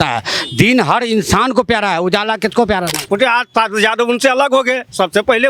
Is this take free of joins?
no; 1 cut; at 3.0 s

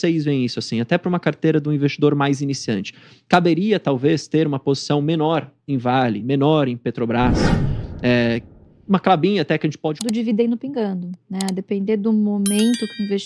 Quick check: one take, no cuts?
no; 1 cut; at 9.9 s

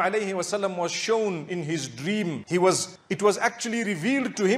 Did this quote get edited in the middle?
no; 0 cuts

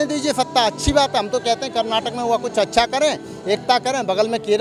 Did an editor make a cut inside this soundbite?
no; 0 cuts

